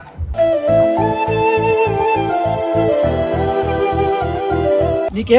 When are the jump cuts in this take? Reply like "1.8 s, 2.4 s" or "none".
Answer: none